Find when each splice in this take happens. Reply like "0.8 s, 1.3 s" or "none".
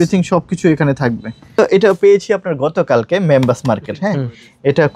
1.6 s